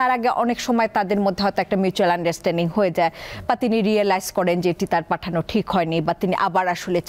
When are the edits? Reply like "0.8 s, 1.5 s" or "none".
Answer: none